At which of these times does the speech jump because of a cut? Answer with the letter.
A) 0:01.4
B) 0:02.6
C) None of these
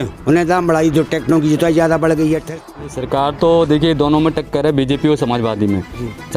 B